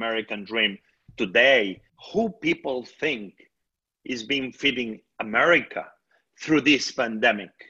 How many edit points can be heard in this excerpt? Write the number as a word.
one